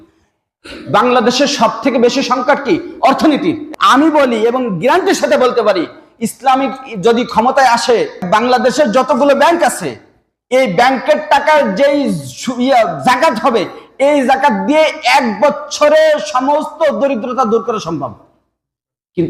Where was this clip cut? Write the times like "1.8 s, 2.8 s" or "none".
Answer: 3.6 s, 8.2 s